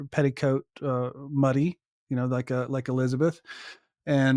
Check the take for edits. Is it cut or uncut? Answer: uncut